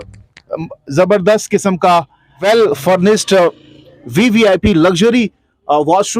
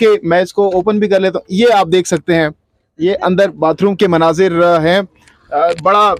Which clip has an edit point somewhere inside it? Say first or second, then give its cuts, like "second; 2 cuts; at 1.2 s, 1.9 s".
first; 1 cut; at 2.3 s